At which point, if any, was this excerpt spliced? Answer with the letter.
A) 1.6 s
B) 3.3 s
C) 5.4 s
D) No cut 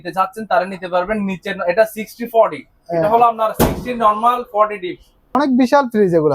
C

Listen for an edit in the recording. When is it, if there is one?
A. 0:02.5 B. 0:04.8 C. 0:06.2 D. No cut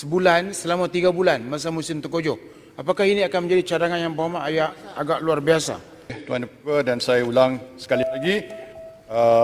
C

